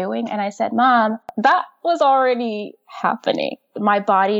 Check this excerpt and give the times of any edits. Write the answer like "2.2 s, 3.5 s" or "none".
1.3 s